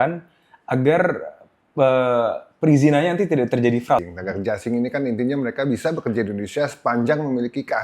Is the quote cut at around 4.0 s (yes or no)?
yes